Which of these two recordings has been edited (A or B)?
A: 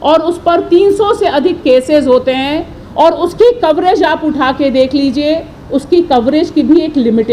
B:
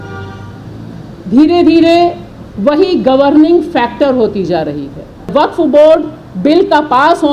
B